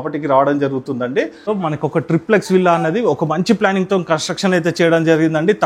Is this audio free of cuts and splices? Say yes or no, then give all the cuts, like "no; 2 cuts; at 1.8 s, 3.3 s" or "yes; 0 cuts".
no; 1 cut; at 1.5 s